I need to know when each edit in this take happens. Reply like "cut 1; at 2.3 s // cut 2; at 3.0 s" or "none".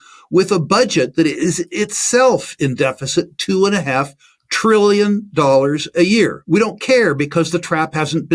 cut 1; at 6.4 s